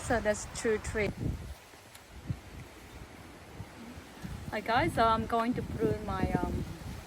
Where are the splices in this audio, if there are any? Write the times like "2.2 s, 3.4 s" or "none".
1.1 s